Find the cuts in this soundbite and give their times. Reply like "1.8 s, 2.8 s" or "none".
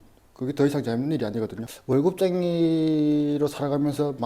1.7 s

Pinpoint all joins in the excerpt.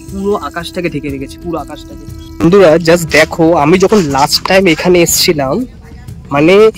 2.2 s

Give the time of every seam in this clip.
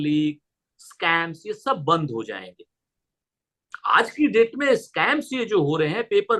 none

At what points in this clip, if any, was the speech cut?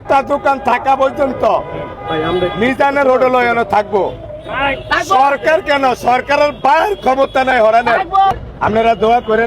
8.3 s

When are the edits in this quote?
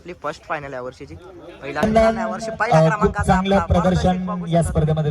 1.8 s

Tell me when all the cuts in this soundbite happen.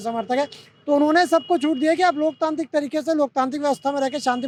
none

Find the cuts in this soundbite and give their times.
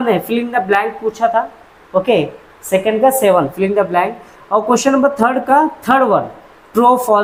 none

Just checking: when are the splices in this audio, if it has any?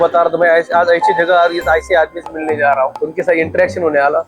3.0 s

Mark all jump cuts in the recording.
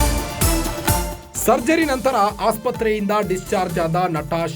1.2 s

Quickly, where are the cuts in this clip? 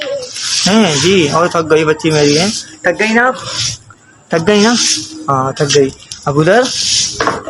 none

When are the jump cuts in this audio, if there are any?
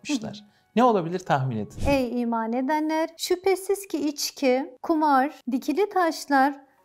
1.8 s, 3.2 s, 4.7 s, 5.4 s

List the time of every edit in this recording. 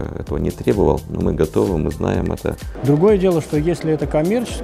2.7 s

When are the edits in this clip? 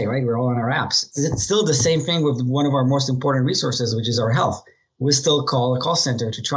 1.0 s

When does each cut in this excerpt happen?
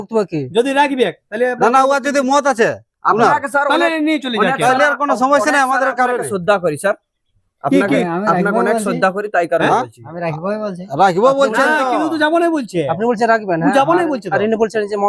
none

